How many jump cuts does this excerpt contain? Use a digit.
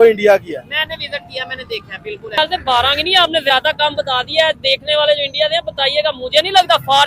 1